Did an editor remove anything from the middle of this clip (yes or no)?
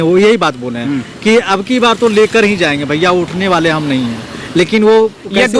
no